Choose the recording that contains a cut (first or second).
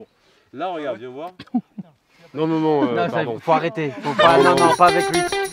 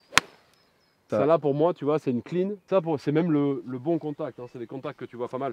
second